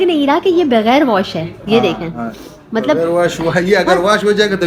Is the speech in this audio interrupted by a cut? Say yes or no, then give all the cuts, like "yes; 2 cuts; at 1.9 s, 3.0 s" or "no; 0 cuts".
no; 0 cuts